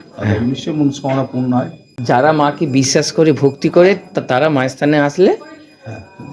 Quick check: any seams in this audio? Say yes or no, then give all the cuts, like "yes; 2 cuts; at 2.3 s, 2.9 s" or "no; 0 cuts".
yes; 1 cut; at 1.9 s